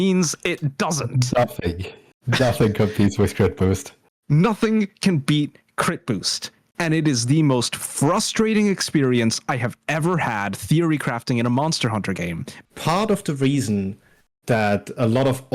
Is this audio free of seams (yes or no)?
no